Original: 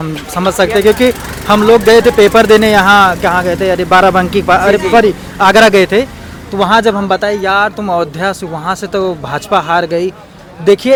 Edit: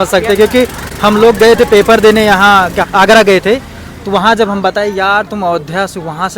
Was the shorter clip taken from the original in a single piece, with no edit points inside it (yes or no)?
no